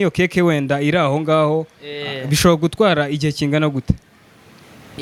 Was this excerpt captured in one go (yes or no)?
yes